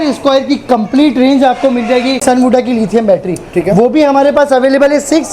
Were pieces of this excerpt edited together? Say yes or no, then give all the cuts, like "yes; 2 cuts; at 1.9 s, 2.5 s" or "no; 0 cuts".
yes; 1 cut; at 2.2 s